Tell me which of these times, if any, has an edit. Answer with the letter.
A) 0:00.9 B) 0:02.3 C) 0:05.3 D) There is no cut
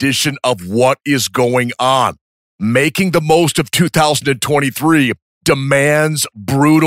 C